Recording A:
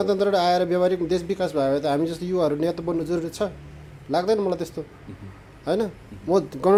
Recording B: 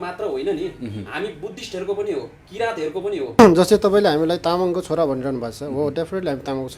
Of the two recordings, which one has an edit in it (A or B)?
B